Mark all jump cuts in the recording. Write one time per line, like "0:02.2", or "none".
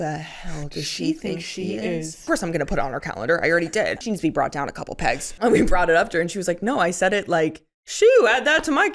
0:02.2
0:04.0
0:05.3